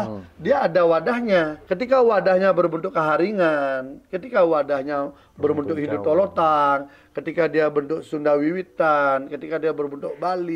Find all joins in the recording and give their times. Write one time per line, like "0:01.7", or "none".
0:01.6